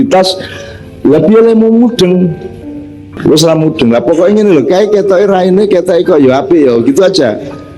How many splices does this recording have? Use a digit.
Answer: 1